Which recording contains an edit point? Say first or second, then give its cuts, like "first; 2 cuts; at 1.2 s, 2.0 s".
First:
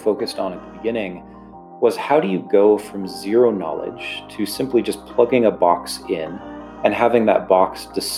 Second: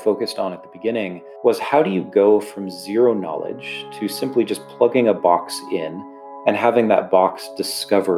second; 1 cut; at 1.2 s